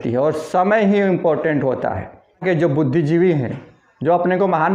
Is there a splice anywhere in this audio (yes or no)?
yes